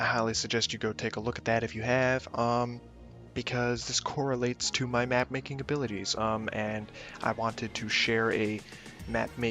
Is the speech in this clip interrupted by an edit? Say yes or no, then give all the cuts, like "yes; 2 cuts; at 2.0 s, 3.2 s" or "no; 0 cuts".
no; 0 cuts